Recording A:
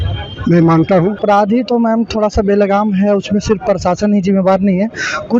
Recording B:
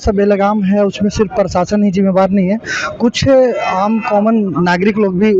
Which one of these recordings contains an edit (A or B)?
A